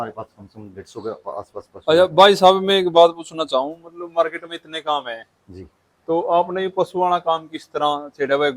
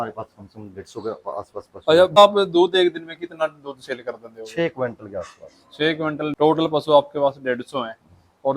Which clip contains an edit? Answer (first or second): second